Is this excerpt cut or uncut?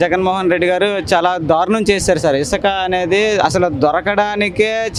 uncut